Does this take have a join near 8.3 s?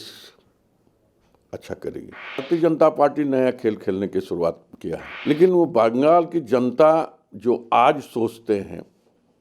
no; 2 cuts; at 2.4 s, 5.1 s

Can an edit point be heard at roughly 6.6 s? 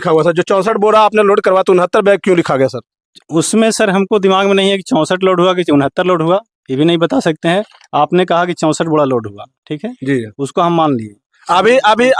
no; 0 cuts

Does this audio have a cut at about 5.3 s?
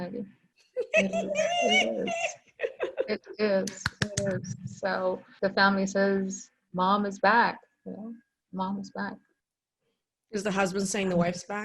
yes; 1 cut; at 5.3 s

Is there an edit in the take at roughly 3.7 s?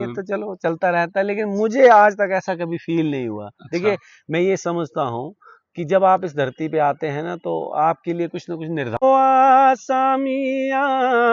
no; 1 cut; at 9.0 s

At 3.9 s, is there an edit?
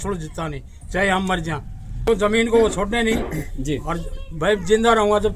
no; 1 cut; at 2.1 s

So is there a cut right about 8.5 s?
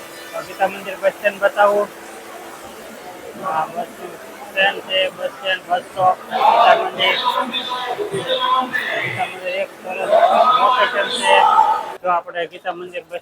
no; 1 cut; at 11.9 s

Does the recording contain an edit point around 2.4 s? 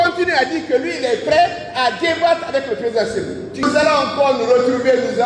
no; 1 cut; at 3.6 s

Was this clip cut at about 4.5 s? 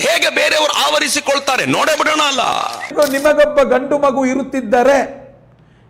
no; 1 cut; at 2.9 s

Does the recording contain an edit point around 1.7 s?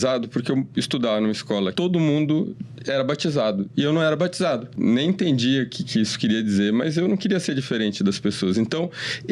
yes; 2 cuts; at 1.7 s, 4.7 s

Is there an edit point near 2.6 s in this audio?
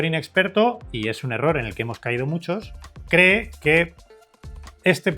no; 0 cuts

